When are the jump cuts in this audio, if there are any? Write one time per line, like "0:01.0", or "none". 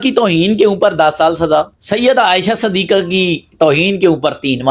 0:01.8